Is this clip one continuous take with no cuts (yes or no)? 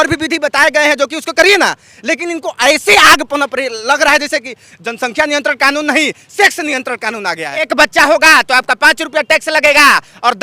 no